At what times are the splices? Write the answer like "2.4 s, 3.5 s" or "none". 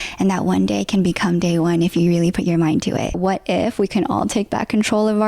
3.2 s